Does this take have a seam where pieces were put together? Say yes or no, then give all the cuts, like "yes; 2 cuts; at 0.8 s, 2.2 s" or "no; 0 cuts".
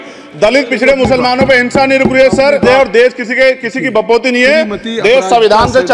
yes; 1 cut; at 2.6 s